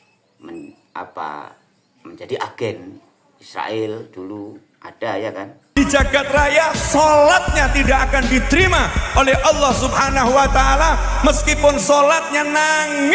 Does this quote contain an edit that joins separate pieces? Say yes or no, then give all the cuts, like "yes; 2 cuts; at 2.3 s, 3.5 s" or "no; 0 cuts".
yes; 1 cut; at 5.7 s